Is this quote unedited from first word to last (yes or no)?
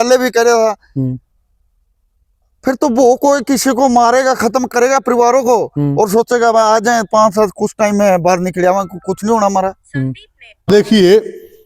no